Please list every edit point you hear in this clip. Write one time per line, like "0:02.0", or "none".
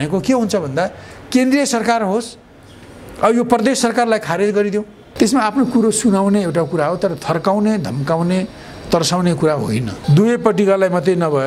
0:05.0
0:09.9